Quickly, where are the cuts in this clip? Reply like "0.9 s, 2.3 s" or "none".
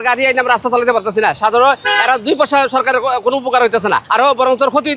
4.1 s